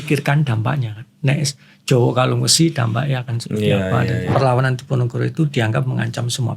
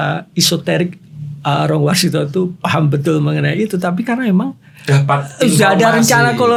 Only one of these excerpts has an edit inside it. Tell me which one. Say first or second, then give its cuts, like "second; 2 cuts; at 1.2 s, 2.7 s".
first; 1 cut; at 4.3 s